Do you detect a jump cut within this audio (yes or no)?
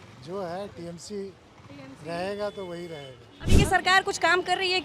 yes